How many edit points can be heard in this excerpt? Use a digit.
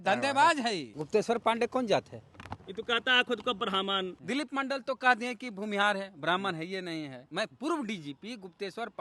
3